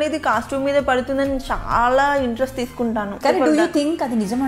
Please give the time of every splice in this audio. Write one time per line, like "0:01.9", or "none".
0:03.1

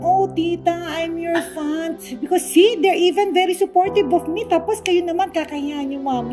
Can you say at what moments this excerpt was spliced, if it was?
0:01.9

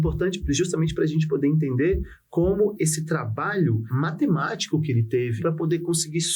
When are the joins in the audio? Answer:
0:02.7
0:03.9
0:05.4

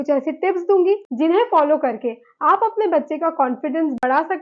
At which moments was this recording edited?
0:01.1

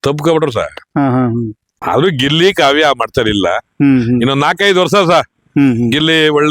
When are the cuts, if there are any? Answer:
0:01.7

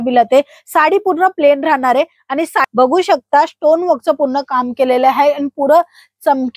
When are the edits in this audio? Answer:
0:02.7

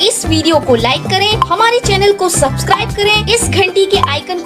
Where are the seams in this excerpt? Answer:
none

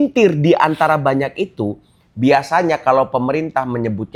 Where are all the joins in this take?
none

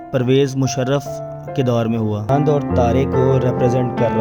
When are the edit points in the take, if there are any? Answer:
0:02.3

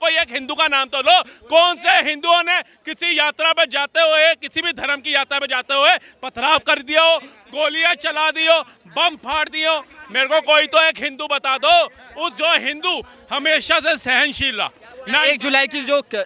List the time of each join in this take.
none

